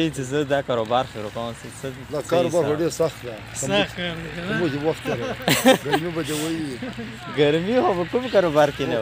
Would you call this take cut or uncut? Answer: uncut